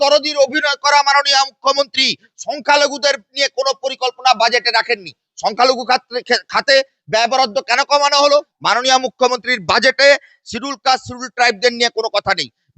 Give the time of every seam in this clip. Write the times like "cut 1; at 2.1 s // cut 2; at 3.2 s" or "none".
cut 1; at 8.5 s

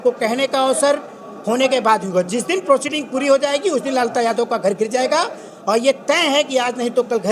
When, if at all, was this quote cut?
none

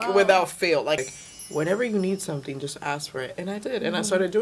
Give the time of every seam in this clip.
cut 1; at 1.0 s

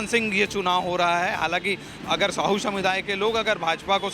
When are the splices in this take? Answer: cut 1; at 1.9 s

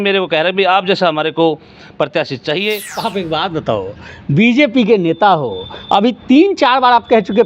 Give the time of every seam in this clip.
cut 1; at 2.9 s

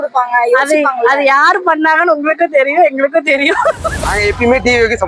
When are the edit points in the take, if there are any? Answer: cut 1; at 4.0 s

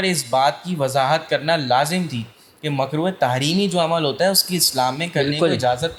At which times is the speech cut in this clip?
none

